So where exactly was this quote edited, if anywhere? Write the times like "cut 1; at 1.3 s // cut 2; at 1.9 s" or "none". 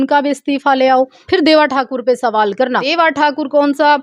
cut 1; at 1.2 s // cut 2; at 2.9 s